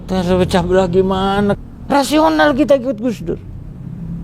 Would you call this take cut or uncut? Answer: cut